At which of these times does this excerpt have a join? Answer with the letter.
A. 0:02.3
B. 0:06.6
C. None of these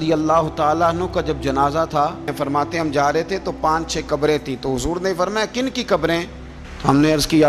A